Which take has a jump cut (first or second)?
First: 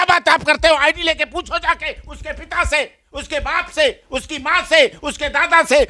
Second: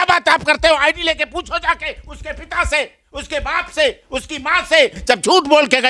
second